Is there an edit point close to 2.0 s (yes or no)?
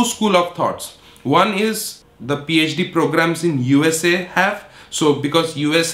yes